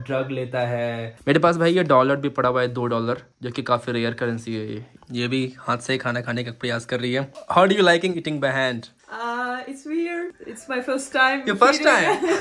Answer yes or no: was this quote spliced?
yes